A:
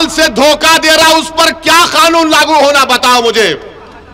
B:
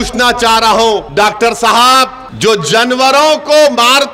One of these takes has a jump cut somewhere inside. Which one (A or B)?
B